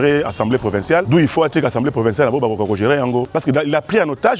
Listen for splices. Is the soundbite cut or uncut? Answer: cut